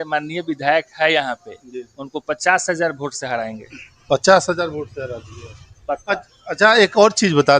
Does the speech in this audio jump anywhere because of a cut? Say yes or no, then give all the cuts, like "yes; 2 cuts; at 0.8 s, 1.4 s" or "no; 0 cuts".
no; 0 cuts